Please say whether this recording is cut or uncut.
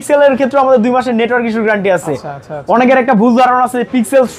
uncut